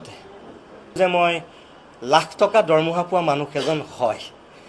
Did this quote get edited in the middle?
yes; 1 cut; at 1.0 s

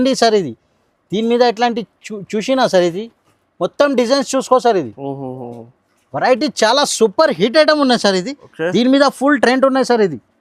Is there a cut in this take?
no; 0 cuts

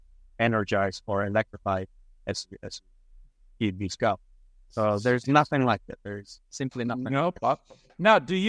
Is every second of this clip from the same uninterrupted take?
yes; 0 cuts

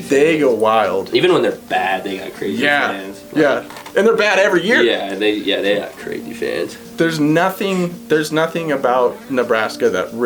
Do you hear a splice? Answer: no; 0 cuts

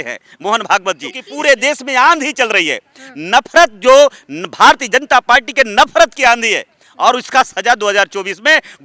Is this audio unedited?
no; 1 cut; at 1.3 s

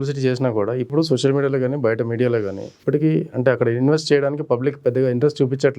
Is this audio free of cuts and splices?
no; 2 cuts; at 0.9 s, 2.8 s

